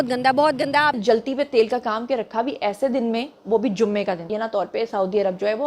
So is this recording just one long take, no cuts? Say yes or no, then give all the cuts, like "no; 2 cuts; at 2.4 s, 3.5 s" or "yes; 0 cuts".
no; 2 cuts; at 0.9 s, 4.3 s